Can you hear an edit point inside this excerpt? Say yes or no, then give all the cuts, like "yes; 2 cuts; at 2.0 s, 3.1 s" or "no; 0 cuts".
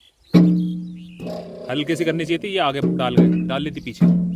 no; 0 cuts